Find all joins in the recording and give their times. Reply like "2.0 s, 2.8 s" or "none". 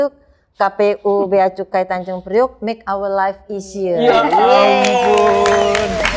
none